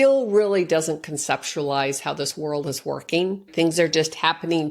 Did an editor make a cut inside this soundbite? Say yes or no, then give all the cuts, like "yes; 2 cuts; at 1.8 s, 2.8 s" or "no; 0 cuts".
yes; 1 cut; at 3.5 s